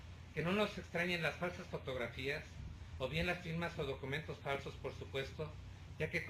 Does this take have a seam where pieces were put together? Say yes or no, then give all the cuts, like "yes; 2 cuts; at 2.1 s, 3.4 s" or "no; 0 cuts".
yes; 1 cut; at 1.2 s